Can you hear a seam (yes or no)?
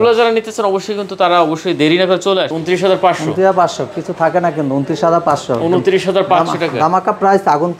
yes